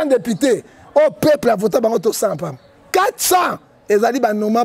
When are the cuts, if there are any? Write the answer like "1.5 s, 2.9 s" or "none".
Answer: 2.7 s